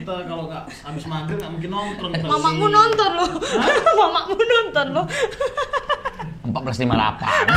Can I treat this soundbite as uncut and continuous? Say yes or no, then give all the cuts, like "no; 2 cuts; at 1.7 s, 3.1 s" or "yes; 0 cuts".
yes; 0 cuts